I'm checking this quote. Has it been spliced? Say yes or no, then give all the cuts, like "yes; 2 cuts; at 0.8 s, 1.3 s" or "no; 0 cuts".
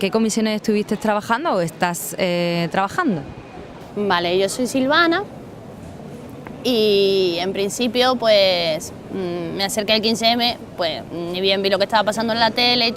no; 0 cuts